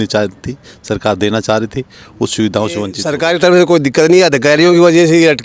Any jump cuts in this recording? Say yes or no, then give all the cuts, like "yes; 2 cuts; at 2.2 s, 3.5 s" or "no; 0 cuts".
yes; 1 cut; at 3.0 s